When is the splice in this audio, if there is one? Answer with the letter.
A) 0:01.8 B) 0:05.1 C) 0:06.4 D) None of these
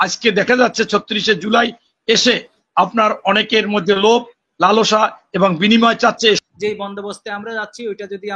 C